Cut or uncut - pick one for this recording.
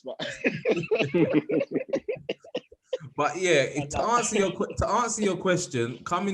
uncut